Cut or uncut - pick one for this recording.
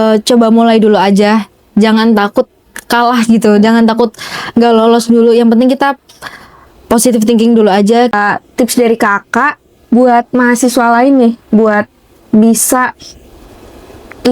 cut